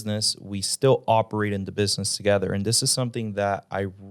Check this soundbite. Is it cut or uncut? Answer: uncut